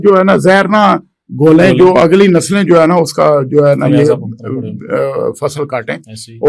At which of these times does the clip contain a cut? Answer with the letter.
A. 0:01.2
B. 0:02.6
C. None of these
C